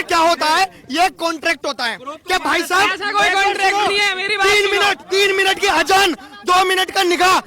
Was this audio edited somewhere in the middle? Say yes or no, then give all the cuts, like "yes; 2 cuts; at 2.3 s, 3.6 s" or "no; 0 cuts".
no; 0 cuts